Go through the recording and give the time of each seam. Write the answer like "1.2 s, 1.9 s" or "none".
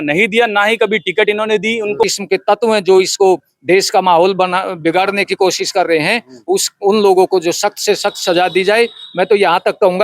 2.0 s